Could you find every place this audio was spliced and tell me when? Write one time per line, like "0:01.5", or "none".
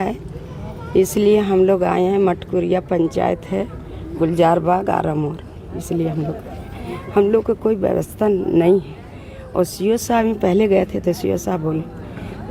none